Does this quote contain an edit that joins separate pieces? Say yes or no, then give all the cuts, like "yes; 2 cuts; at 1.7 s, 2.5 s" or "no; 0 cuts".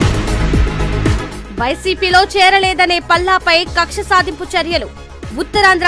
yes; 1 cut; at 1.2 s